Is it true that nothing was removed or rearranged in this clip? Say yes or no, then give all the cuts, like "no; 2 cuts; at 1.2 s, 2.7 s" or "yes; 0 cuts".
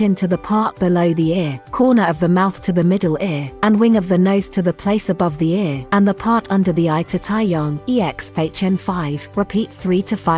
no; 5 cuts; at 1.6 s, 3.4 s, 5.8 s, 7.8 s, 9.2 s